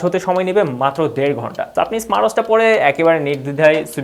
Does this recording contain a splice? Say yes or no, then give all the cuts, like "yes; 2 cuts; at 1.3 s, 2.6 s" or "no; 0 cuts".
yes; 1 cut; at 1.7 s